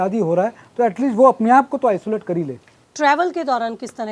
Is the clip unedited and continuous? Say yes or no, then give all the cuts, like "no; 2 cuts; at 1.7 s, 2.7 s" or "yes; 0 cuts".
yes; 0 cuts